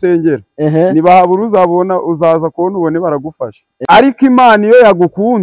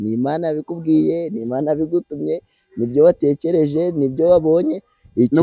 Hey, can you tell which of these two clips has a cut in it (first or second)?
first